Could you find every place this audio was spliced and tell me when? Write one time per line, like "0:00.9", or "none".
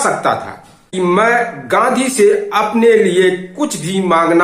0:00.9